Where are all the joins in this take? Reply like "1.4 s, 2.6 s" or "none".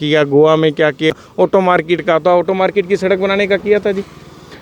1.1 s